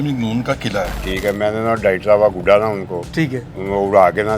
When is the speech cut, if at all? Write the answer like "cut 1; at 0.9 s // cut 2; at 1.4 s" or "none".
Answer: cut 1; at 1.0 s

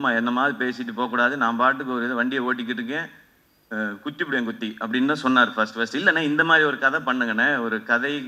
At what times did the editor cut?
none

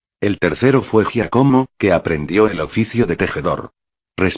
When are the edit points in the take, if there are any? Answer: none

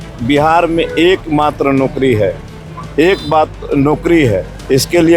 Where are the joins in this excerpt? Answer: none

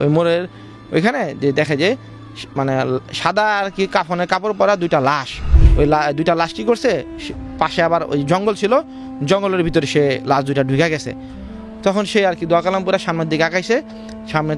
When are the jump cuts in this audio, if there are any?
cut 1; at 5.6 s

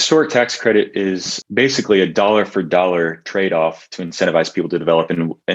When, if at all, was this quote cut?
cut 1; at 1.4 s

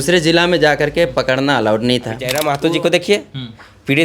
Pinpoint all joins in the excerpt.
cut 1; at 2.4 s

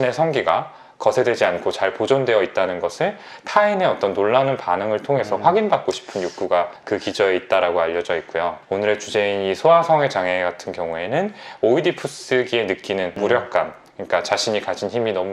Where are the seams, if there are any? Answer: none

